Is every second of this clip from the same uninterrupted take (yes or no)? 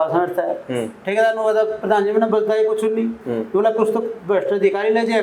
yes